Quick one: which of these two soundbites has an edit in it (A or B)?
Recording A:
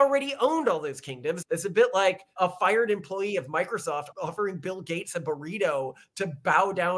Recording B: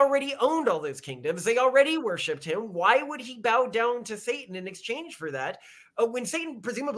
A